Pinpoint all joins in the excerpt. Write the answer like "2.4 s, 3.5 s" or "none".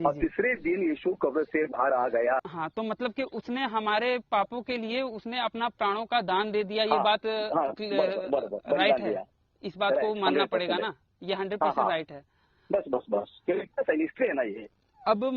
2.4 s